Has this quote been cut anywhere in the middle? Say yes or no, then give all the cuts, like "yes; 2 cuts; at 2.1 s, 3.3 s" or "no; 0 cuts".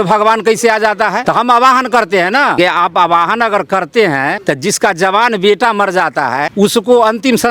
yes; 4 cuts; at 1.2 s, 2.6 s, 4.4 s, 6.5 s